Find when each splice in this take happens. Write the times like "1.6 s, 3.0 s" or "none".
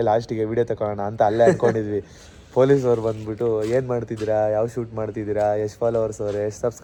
none